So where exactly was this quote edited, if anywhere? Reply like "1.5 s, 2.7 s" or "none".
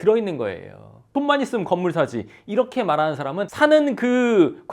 1.0 s, 3.5 s